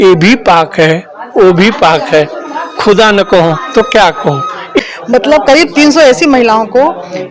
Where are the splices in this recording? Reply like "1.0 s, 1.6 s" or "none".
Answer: 4.8 s